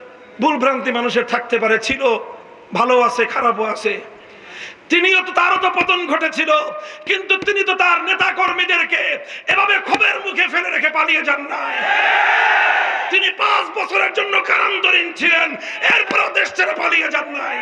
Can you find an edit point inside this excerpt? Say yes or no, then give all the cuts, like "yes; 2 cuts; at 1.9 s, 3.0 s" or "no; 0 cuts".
no; 0 cuts